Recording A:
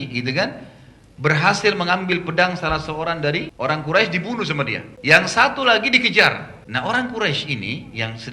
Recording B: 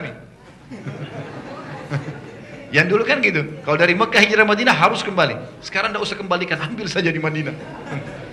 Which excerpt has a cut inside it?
A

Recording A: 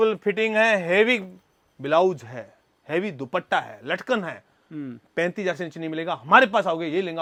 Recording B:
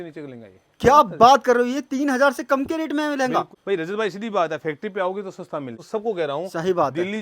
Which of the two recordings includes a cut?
B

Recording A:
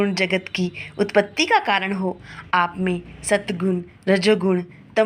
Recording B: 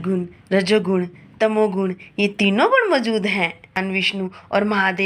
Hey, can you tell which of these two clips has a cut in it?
B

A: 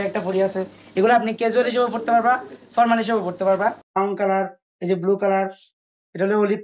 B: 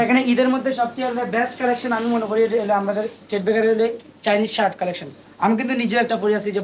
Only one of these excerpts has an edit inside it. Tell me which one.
A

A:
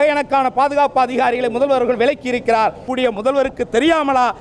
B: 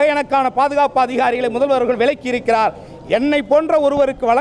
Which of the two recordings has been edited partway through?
A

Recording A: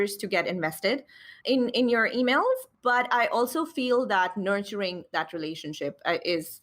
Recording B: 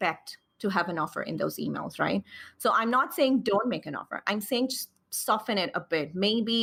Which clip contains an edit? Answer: A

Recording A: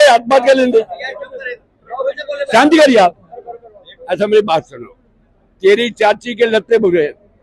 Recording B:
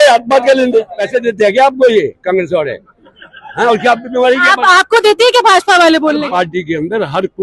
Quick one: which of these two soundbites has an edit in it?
B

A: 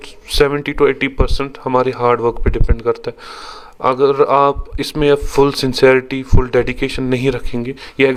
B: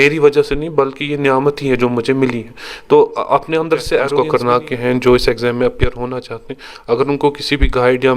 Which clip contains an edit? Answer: B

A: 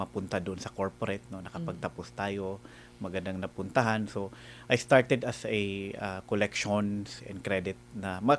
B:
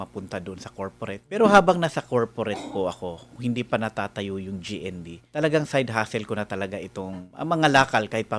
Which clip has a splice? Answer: B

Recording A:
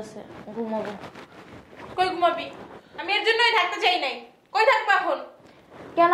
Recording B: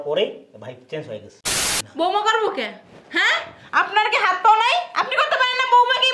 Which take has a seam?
B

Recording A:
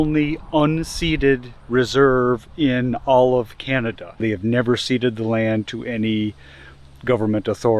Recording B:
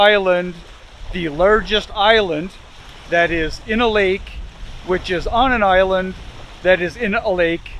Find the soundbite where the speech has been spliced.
A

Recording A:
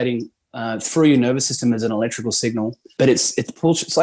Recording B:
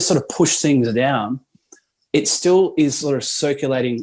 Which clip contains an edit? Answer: A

